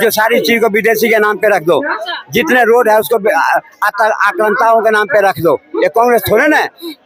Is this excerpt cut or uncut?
uncut